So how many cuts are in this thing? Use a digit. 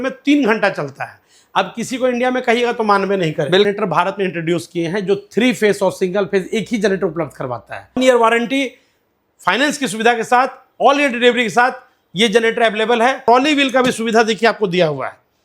3